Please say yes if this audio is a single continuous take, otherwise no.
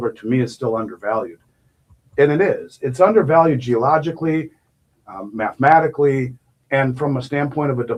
yes